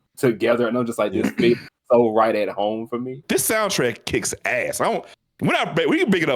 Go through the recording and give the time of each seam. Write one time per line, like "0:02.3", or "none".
0:03.2

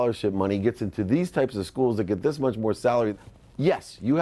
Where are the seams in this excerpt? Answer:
0:03.1

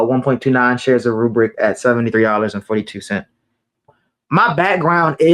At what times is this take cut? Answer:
0:04.0

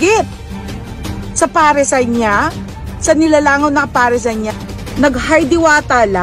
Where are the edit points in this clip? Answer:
0:04.5

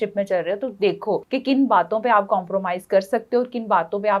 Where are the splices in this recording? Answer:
0:01.2

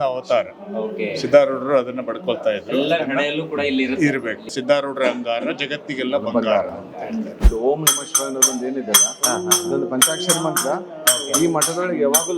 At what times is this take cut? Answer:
0:04.5
0:07.5

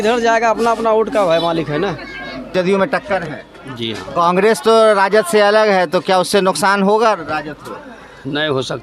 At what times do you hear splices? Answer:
0:02.5

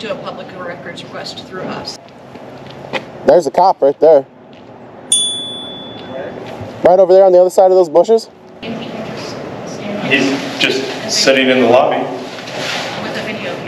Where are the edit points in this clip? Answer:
0:02.0
0:08.6

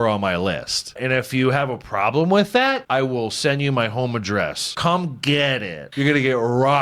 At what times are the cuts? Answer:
0:01.0
0:02.8
0:04.6
0:05.8

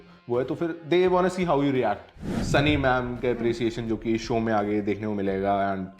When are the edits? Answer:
0:02.3

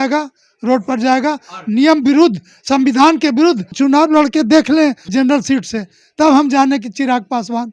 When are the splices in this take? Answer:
0:03.7
0:05.1

